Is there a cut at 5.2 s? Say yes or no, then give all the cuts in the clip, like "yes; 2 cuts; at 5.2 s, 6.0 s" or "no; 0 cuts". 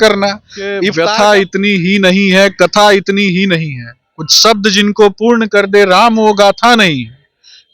no; 1 cut; at 0.9 s